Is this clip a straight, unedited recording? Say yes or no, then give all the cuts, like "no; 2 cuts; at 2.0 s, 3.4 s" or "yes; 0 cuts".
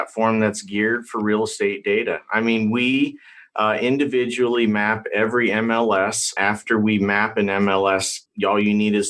no; 2 cuts; at 6.3 s, 8.2 s